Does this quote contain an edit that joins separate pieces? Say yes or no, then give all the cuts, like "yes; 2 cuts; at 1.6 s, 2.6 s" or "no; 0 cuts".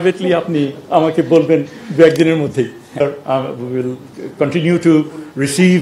no; 0 cuts